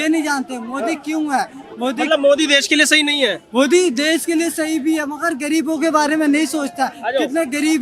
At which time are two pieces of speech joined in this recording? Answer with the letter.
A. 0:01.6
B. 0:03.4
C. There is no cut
C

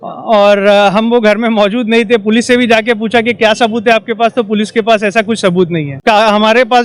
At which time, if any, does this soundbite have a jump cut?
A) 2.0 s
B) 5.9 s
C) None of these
B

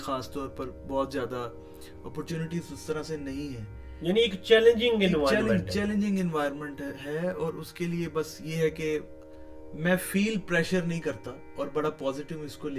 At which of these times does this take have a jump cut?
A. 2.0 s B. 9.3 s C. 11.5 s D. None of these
D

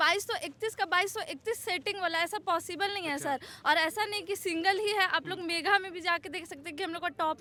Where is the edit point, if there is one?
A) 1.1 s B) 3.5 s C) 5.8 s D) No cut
D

